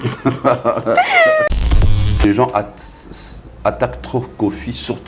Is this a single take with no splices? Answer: no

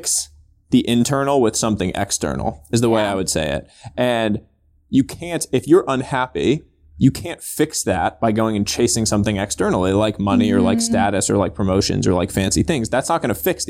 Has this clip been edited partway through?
no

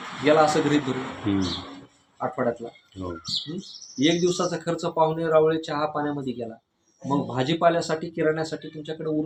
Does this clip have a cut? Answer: no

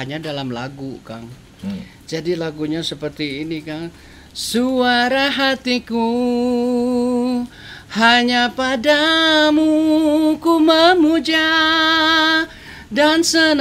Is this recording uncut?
yes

